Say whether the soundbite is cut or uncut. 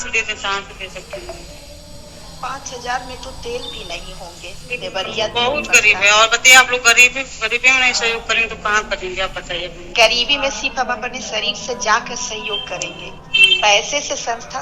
uncut